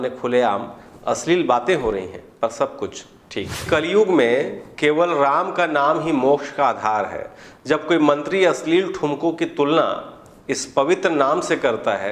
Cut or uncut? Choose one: cut